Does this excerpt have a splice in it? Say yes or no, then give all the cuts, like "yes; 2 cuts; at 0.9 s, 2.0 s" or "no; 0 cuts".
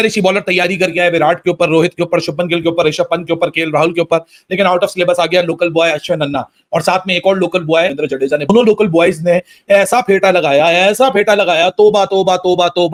no; 0 cuts